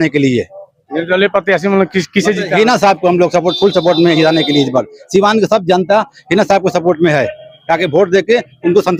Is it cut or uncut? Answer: uncut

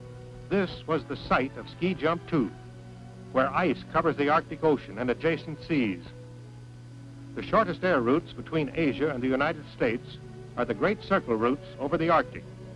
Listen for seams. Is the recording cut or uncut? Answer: cut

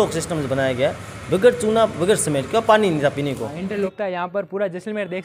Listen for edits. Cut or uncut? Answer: cut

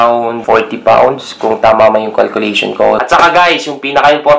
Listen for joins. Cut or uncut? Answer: cut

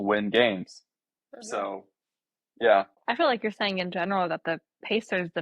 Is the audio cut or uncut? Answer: cut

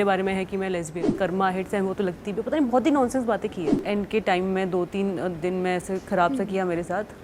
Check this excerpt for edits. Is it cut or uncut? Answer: cut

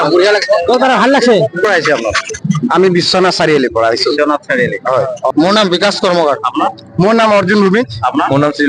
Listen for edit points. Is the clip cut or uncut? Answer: cut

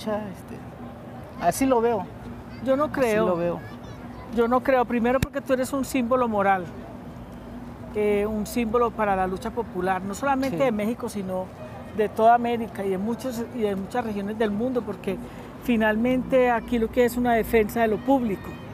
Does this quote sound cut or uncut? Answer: uncut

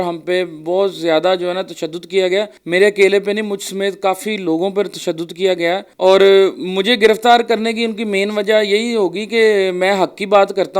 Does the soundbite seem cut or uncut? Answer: cut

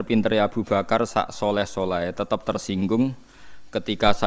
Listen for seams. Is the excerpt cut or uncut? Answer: uncut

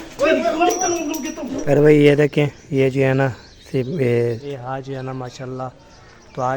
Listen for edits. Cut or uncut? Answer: cut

